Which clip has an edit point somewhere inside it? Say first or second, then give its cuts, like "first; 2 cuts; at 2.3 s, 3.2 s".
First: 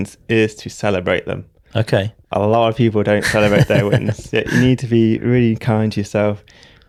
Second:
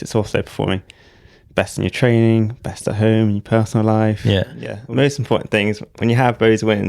second; 1 cut; at 4.8 s